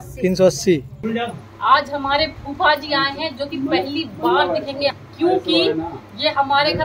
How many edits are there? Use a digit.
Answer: 2